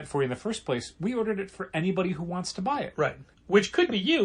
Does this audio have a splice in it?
yes; 1 cut; at 3.3 s

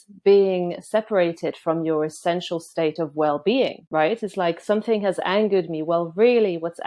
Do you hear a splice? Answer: yes; 1 cut; at 3.8 s

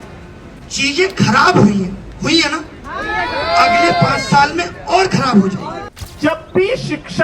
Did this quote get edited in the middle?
yes; 1 cut; at 6.2 s

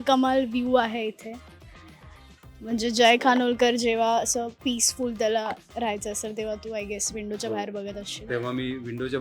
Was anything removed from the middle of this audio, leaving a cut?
no; 0 cuts

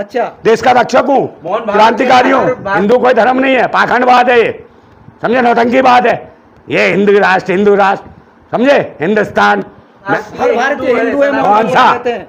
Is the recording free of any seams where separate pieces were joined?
no; 2 cuts; at 2.7 s, 10.0 s

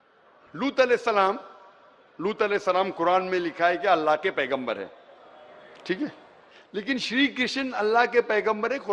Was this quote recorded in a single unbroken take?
no; 1 cut; at 4.0 s

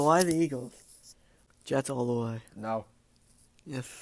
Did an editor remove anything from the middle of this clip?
yes; 1 cut; at 1.4 s

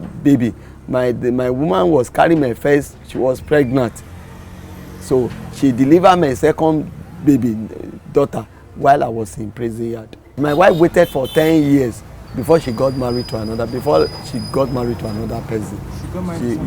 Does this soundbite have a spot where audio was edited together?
yes; 1 cut; at 10.4 s

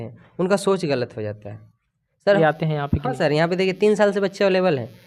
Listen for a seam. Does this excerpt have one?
yes; 1 cut; at 2.4 s

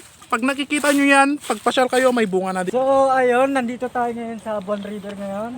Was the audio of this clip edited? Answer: yes; 1 cut; at 2.7 s

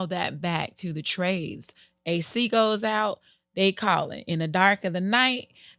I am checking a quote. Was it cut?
no; 0 cuts

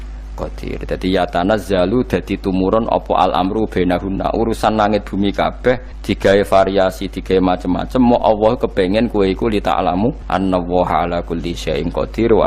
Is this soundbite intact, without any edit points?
no; 2 cuts; at 5.9 s, 10.2 s

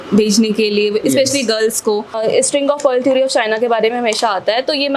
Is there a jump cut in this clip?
yes; 1 cut; at 2.1 s

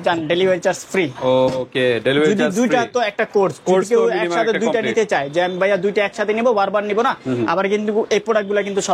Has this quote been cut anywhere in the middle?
no; 0 cuts

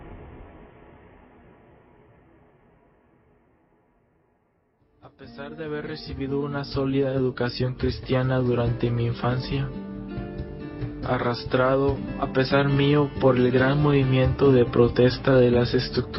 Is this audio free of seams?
yes; 0 cuts

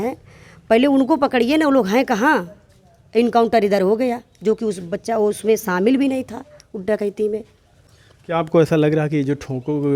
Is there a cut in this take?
no; 0 cuts

